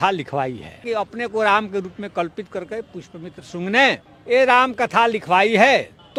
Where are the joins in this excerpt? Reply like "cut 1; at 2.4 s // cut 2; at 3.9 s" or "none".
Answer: none